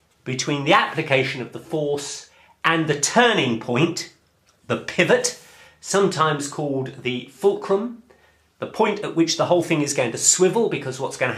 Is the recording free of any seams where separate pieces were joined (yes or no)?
no